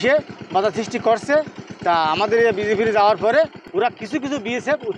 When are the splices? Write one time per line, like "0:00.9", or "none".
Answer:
0:03.6